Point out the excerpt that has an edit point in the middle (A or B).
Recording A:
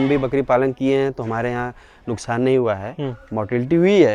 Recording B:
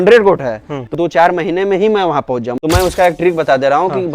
B